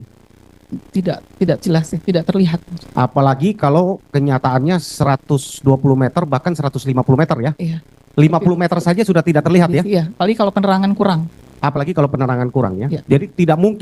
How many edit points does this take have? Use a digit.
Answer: 1